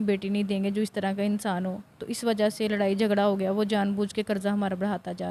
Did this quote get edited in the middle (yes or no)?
no